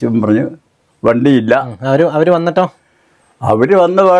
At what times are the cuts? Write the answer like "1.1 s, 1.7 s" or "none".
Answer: none